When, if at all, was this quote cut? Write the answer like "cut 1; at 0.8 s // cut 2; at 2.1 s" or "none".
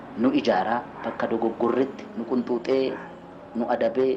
cut 1; at 2.1 s